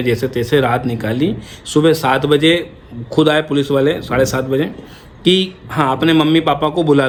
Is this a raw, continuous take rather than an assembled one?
yes; 0 cuts

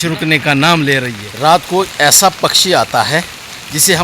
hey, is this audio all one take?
no; 1 cut; at 1.0 s

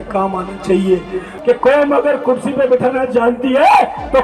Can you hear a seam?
yes; 1 cut; at 1.3 s

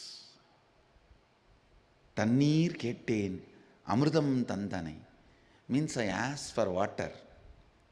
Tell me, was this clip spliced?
no; 0 cuts

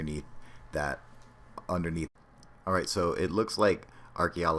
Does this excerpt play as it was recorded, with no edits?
yes; 0 cuts

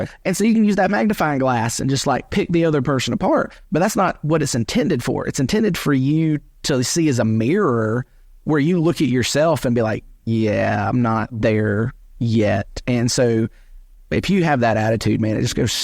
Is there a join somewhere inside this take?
yes; 1 cut; at 11.3 s

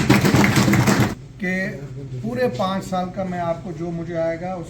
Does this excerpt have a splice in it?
yes; 1 cut; at 1.1 s

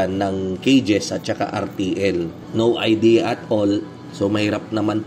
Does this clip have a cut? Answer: yes; 1 cut; at 2.4 s

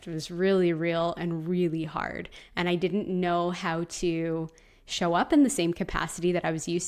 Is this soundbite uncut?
yes; 0 cuts

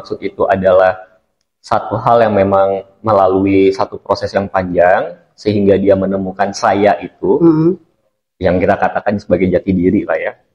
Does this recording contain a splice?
no; 0 cuts

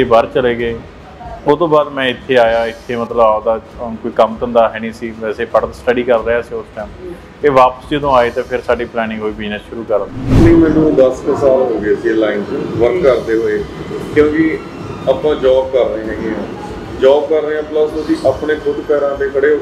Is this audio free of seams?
no; 1 cut; at 10.3 s

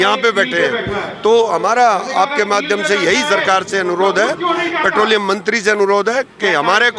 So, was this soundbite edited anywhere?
no; 0 cuts

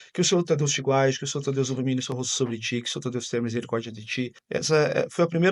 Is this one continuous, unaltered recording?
no; 1 cut; at 4.4 s

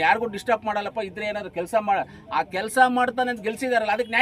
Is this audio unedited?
yes; 0 cuts

